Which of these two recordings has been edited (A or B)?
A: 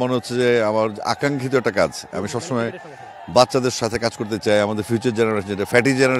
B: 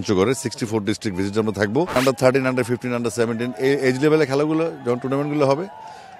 B